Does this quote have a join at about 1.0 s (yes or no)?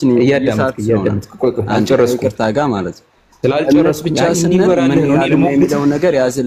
no